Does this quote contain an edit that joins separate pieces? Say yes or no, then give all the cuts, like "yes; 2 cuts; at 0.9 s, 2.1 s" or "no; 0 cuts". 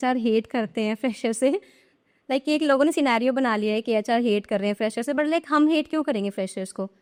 no; 0 cuts